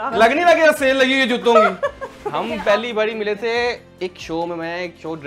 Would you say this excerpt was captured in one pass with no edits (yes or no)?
no